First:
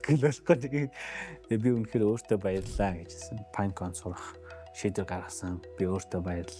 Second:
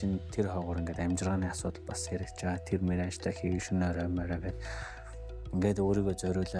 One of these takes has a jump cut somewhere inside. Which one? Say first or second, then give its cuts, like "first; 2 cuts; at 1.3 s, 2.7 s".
first; 1 cut; at 3.4 s